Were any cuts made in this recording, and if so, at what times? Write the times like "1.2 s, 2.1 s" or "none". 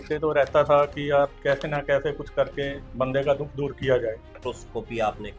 1.4 s, 2.8 s, 4.4 s